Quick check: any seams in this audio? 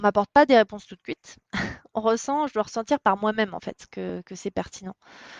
no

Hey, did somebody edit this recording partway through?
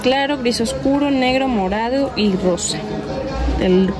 no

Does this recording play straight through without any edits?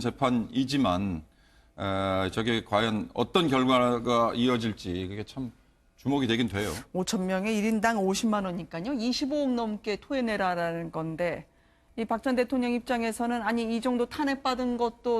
no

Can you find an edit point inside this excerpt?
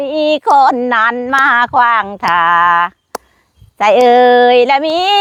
no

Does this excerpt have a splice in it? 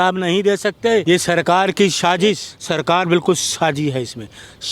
yes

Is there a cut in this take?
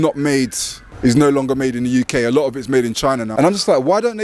yes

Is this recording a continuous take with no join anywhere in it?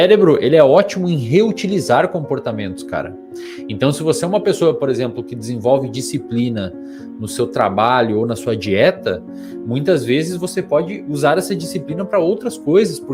yes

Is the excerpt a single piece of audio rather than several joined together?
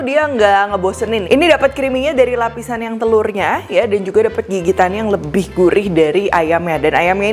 no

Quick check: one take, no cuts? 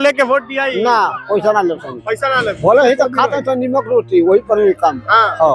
yes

